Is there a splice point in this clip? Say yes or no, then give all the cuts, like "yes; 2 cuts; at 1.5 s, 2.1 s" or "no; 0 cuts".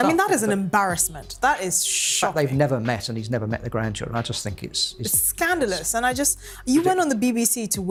no; 0 cuts